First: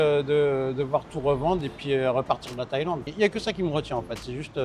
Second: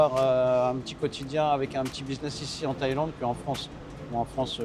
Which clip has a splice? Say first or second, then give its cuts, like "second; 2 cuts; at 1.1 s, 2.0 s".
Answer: first; 1 cut; at 3.1 s